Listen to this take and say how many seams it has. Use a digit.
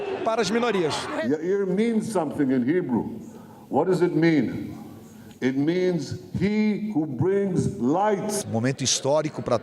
2